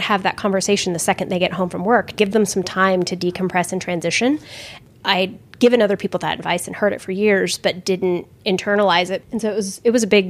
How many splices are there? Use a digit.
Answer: 2